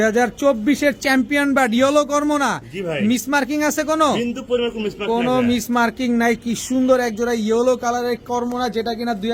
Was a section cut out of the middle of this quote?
no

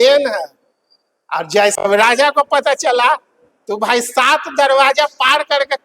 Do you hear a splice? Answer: yes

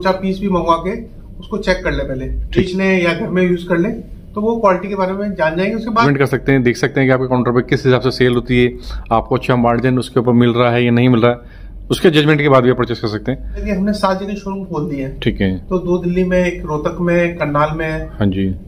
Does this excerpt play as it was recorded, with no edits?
no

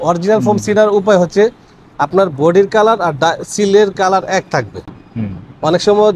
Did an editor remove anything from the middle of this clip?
no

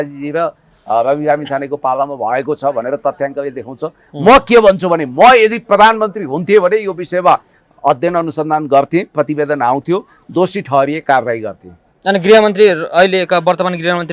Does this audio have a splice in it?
no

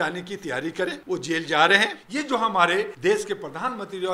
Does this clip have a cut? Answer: yes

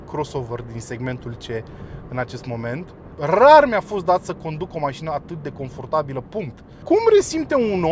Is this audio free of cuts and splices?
no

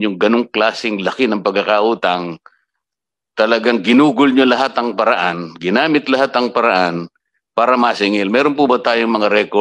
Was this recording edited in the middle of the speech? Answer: no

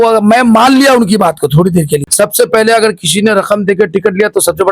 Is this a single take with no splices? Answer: no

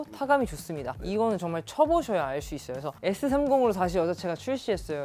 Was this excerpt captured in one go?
no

